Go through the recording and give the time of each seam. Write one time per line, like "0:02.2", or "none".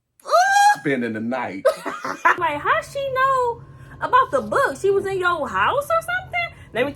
0:02.4

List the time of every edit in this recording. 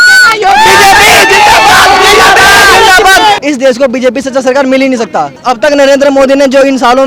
0:03.4
0:05.4

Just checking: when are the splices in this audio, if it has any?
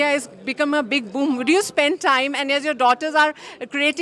none

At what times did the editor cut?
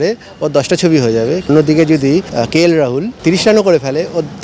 0:01.5
0:02.3
0:03.1

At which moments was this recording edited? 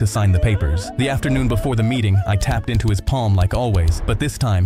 none

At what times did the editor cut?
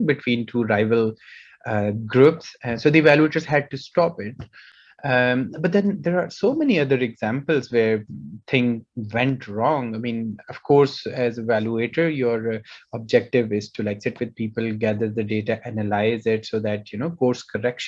none

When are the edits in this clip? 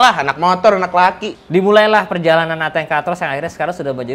0:01.3

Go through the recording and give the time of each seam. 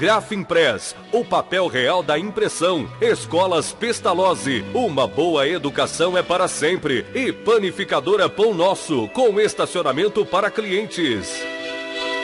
0:11.3

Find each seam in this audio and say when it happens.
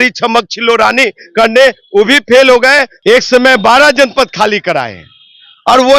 0:02.9

